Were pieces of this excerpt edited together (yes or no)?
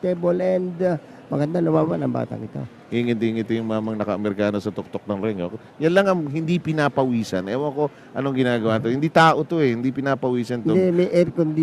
yes